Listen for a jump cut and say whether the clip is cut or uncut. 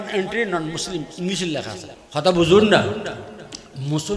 cut